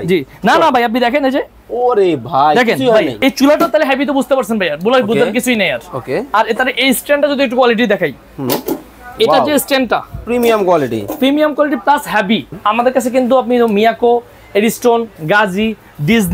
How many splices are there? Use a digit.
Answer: 2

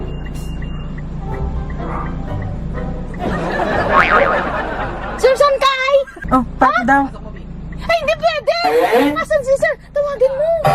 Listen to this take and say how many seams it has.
2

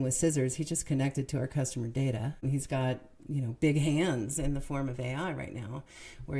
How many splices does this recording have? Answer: 1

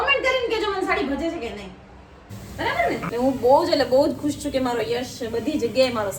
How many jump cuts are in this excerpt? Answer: 1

